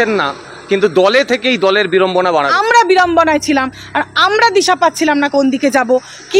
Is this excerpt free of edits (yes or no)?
no